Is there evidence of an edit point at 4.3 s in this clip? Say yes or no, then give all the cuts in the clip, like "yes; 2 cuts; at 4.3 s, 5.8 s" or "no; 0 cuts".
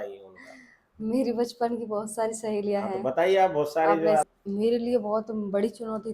yes; 1 cut; at 4.3 s